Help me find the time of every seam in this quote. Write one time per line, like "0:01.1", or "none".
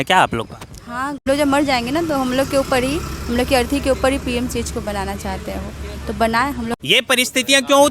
0:01.3
0:06.7